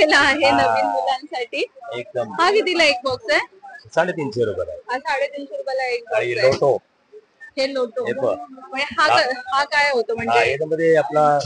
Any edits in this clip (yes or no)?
no